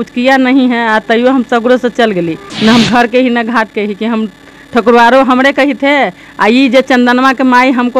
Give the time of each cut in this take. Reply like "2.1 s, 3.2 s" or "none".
2.4 s

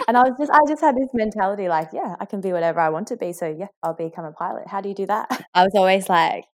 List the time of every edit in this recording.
3.7 s, 5.3 s

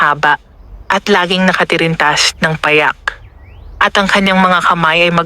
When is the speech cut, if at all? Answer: 2.0 s

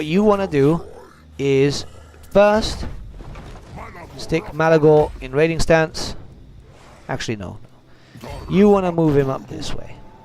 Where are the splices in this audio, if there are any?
5.2 s

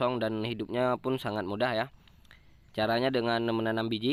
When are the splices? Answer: none

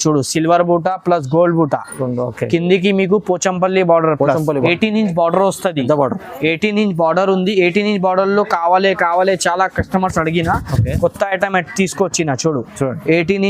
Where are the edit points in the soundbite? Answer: 4.6 s

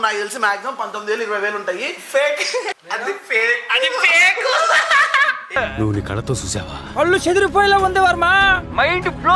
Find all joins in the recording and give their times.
2.7 s

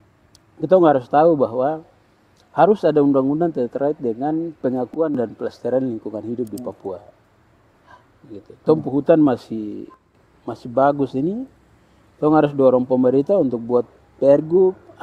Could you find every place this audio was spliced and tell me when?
none

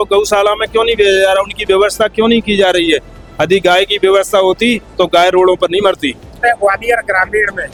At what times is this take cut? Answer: none

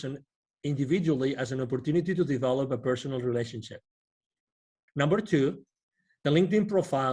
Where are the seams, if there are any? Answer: 4.8 s

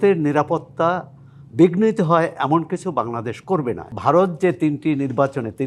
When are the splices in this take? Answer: 3.9 s

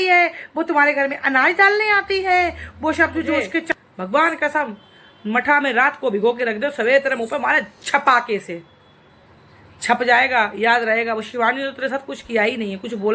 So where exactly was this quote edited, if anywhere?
3.7 s

